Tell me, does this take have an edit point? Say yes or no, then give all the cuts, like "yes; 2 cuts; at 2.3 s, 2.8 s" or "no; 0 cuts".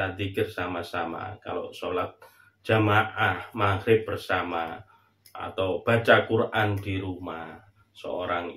no; 0 cuts